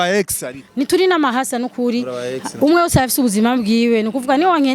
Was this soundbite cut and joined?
no; 0 cuts

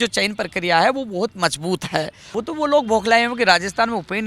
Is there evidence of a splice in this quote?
yes; 1 cut; at 2.2 s

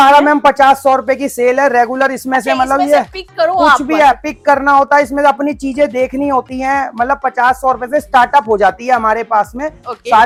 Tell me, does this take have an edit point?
no; 0 cuts

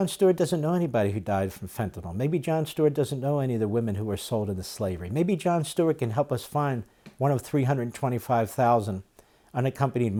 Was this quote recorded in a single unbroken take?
yes; 0 cuts

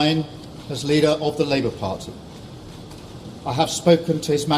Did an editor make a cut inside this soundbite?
yes; 1 cut; at 2.6 s

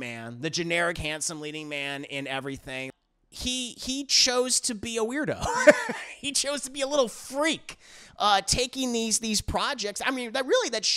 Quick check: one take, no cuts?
no; 1 cut; at 2.9 s

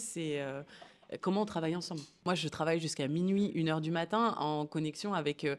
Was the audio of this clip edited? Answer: yes; 1 cut; at 2.2 s

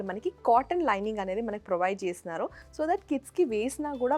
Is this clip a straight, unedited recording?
yes; 0 cuts

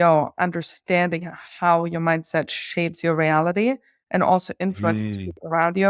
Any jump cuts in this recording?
no; 0 cuts

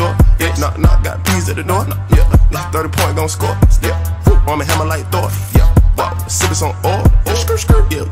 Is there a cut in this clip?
no; 0 cuts

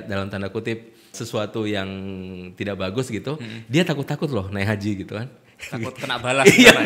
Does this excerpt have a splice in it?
yes; 1 cut; at 1.2 s

